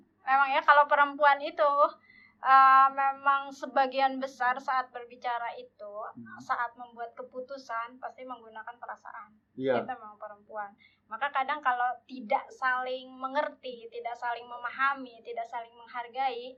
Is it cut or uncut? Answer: uncut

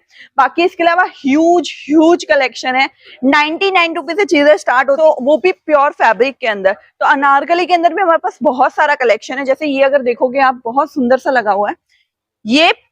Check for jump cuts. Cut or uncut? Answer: cut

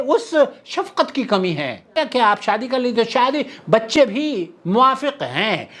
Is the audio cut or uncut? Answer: cut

